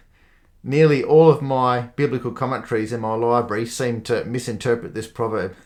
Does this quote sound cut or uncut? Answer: uncut